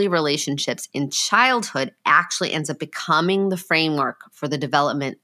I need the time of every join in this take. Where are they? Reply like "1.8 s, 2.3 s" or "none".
none